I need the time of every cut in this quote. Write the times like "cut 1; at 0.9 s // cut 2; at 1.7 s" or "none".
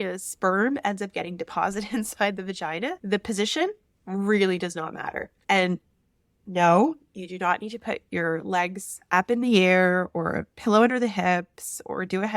cut 1; at 3.0 s // cut 2; at 5.3 s